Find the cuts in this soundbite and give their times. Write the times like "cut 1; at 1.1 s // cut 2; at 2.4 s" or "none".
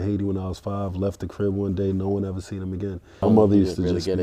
cut 1; at 3.2 s